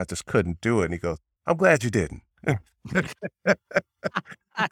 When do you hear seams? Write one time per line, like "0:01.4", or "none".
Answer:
0:01.3
0:02.3